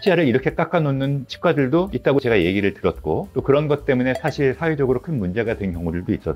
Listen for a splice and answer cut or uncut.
uncut